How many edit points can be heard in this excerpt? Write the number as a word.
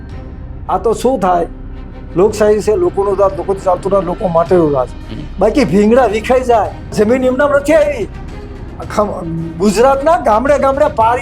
one